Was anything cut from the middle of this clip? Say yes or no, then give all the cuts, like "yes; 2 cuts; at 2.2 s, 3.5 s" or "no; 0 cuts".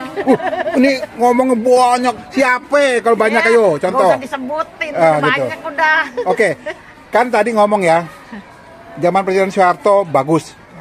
no; 0 cuts